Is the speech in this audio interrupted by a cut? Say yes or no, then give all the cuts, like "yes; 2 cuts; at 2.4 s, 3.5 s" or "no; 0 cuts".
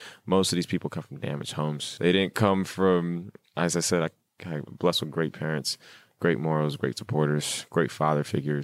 yes; 1 cut; at 1.9 s